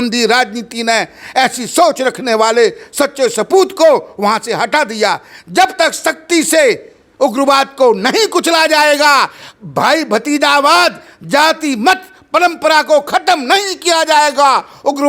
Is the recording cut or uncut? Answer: uncut